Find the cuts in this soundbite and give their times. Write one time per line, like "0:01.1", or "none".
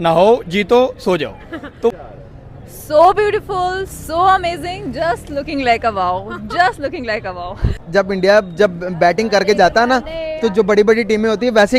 0:01.9
0:07.7

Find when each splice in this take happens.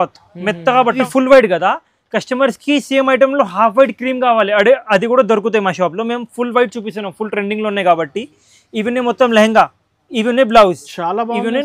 0:01.0

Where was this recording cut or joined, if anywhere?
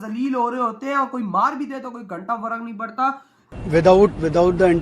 0:03.3

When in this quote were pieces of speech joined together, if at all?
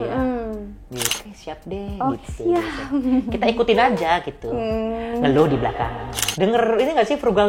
0:01.2
0:06.2

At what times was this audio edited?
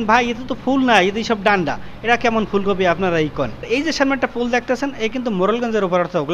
0:03.6

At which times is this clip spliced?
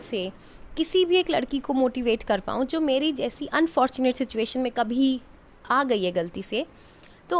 none

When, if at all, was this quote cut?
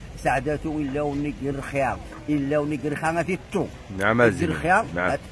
none

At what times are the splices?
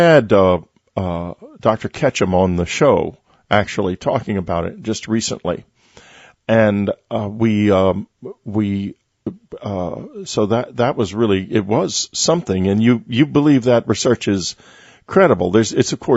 0:14.0

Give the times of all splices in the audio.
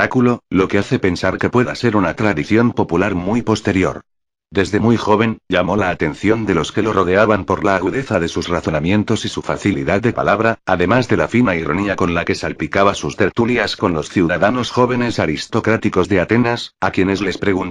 0:10.0

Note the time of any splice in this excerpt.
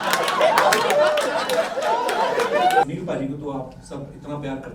0:02.8

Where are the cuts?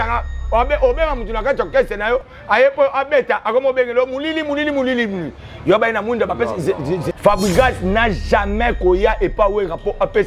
0:07.1

